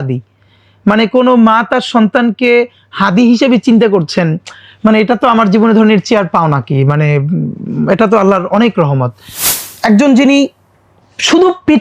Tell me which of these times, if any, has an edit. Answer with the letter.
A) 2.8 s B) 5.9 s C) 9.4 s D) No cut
C